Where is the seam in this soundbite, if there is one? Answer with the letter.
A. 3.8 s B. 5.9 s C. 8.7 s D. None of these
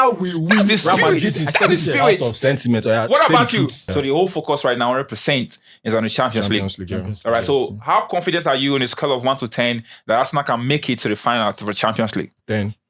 A